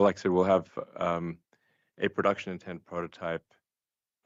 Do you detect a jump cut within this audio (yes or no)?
no